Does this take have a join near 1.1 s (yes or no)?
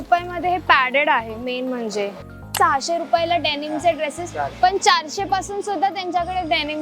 no